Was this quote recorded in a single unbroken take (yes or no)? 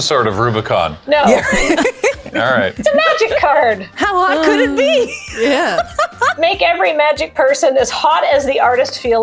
no